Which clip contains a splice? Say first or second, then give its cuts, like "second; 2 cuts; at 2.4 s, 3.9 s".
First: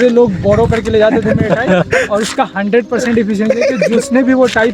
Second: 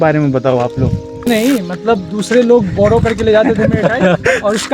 second; 1 cut; at 1.3 s